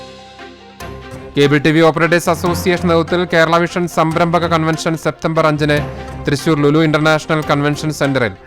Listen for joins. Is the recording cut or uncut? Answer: cut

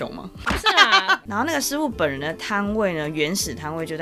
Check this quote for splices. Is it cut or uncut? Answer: cut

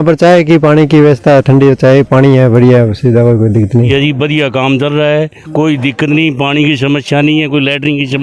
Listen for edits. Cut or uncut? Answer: cut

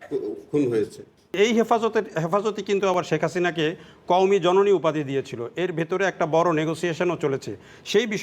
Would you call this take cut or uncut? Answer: cut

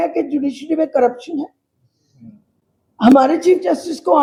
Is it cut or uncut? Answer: uncut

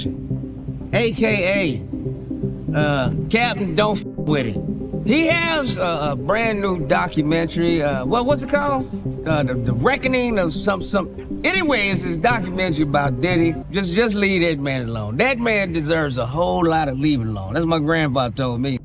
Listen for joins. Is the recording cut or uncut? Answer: uncut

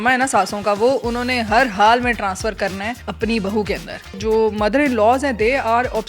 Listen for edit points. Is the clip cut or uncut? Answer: cut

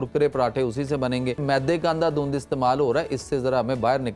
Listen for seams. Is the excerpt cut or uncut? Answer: cut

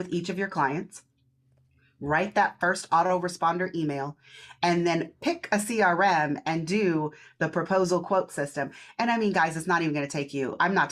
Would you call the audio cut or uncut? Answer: uncut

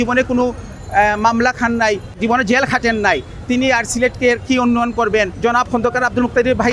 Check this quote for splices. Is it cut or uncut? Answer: cut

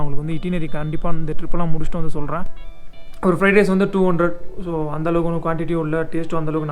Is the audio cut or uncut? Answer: cut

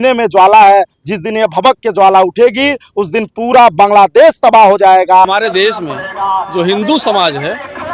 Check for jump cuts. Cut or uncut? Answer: cut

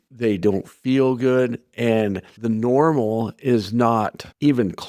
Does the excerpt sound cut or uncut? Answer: uncut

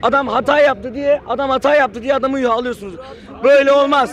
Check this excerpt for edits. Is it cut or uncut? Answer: uncut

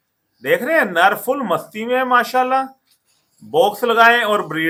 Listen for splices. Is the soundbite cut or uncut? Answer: uncut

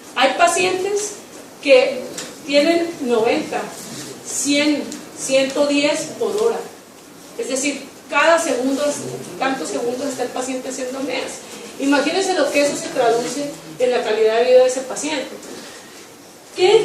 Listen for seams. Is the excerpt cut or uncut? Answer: cut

